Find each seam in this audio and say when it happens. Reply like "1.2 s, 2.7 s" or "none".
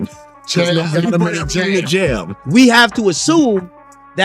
2.4 s